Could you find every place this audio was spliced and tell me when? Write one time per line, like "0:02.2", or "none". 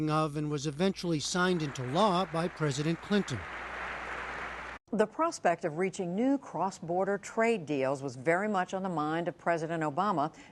none